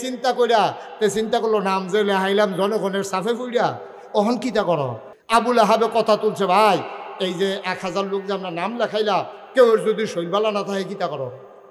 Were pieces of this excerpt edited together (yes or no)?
yes